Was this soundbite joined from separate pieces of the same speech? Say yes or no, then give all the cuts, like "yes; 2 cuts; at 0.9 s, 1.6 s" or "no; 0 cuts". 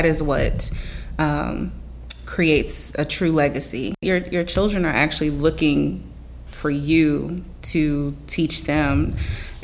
yes; 1 cut; at 4.0 s